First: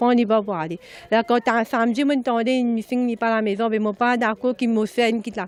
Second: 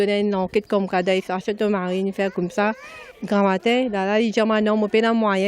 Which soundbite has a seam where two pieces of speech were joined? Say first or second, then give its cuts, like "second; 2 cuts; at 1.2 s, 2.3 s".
second; 1 cut; at 2.3 s